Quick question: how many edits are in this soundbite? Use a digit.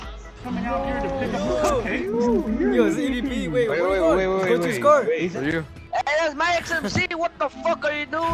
1